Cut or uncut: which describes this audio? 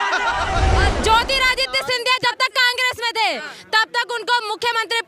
cut